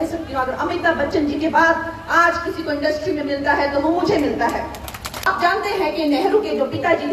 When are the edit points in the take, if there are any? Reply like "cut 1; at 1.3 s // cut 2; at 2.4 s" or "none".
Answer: cut 1; at 5.3 s